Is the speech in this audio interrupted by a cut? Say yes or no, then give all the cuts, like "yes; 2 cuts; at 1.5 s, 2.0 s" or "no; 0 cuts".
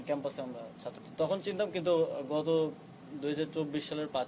yes; 1 cut; at 1.0 s